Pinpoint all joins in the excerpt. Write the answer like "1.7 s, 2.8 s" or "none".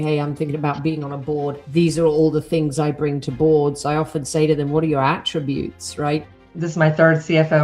1.6 s, 6.4 s